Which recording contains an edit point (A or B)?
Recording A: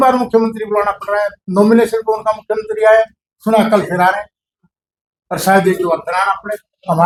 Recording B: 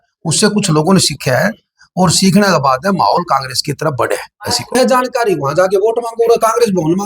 B